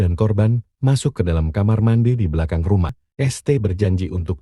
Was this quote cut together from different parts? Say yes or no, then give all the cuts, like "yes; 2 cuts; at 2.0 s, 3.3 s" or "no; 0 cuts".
yes; 1 cut; at 3.0 s